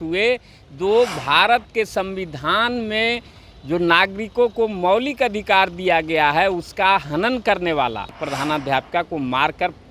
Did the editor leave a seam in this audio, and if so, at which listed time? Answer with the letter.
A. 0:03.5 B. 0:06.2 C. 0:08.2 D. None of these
C